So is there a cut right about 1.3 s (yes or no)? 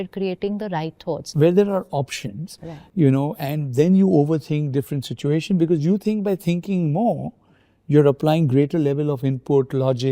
yes